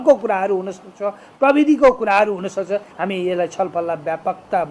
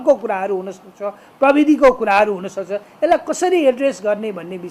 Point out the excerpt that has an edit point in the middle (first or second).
first